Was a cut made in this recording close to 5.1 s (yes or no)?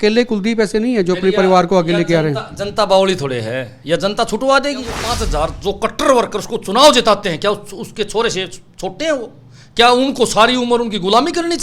yes